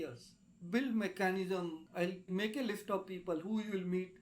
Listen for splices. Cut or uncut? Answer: cut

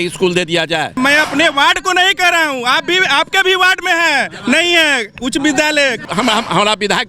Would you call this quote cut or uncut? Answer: cut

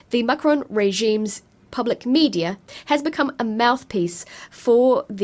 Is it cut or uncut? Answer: cut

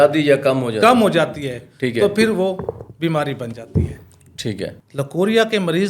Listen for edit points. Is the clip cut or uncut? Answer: cut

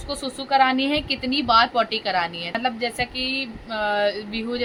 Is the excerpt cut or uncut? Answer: uncut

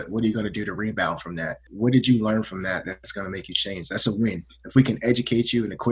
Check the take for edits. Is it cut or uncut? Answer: cut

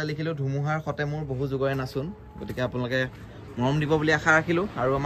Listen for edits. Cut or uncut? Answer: uncut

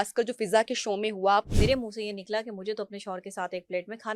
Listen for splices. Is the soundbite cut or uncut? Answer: cut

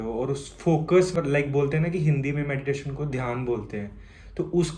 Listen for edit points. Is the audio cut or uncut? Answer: cut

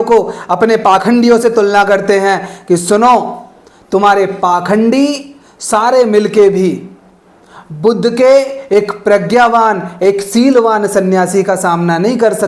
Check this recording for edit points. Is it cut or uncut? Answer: uncut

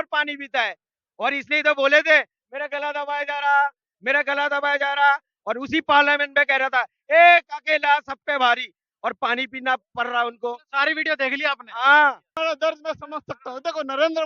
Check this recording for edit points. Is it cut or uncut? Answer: cut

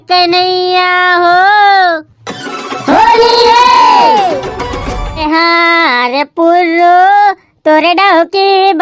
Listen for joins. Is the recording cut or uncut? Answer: cut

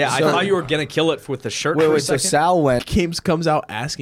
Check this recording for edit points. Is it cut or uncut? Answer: cut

